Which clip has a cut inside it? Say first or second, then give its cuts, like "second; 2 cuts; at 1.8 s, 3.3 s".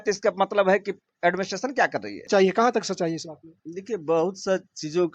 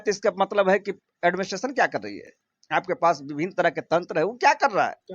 first; 1 cut; at 2.3 s